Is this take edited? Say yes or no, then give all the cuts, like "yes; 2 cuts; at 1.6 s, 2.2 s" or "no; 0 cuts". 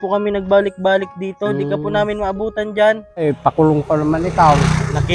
yes; 1 cut; at 3.2 s